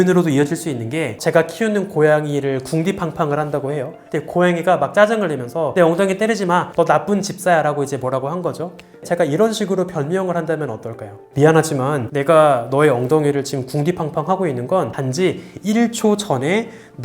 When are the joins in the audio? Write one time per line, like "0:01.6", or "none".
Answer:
0:01.2
0:09.0
0:14.9